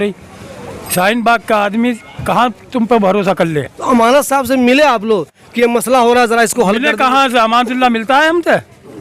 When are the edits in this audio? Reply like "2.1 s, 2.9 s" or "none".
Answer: none